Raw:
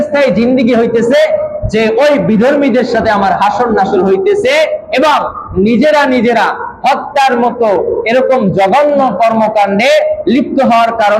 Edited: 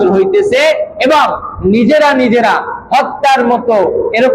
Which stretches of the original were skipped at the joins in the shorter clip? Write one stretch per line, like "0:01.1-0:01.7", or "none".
none